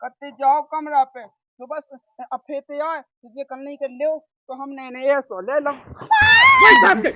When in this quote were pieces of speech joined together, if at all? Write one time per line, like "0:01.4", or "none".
none